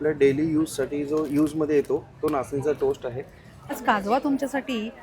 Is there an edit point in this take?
yes; 1 cut; at 3.7 s

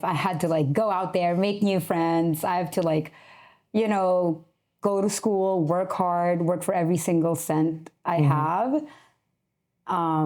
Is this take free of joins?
yes; 0 cuts

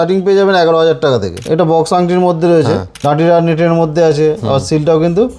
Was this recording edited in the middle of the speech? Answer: yes; 2 cuts; at 1.4 s, 2.9 s

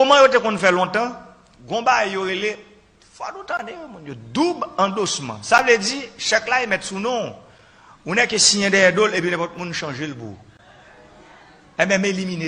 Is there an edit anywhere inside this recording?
no; 0 cuts

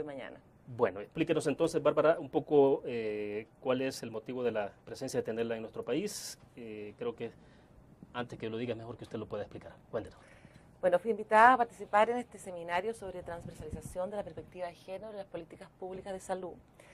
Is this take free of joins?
yes; 0 cuts

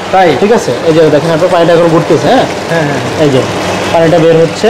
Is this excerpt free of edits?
yes; 0 cuts

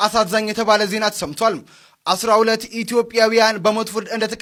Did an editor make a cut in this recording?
no; 0 cuts

